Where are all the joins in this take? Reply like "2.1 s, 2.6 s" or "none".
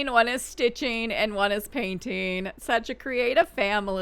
none